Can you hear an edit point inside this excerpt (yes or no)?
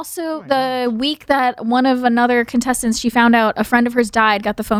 no